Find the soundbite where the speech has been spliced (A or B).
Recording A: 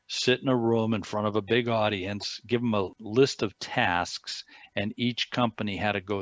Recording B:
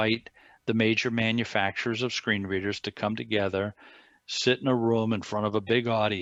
A